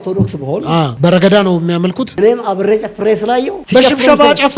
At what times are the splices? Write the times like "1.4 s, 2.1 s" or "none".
0.9 s, 2.1 s, 3.6 s